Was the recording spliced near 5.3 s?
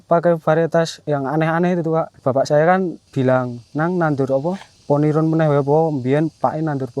no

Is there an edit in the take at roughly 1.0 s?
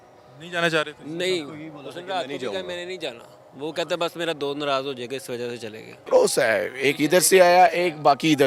no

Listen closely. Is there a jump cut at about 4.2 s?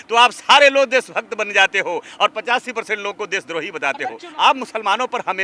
yes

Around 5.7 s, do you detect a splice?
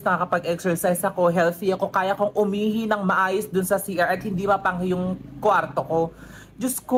yes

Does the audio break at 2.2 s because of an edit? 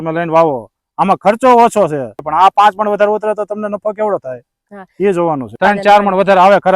yes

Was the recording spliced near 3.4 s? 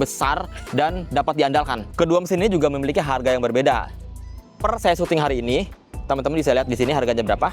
no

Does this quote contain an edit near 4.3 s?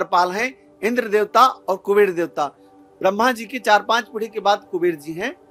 no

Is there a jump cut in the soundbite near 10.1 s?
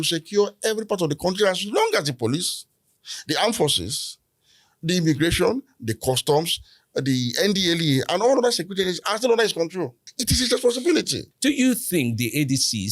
yes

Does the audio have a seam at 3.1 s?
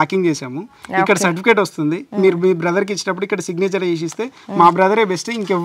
no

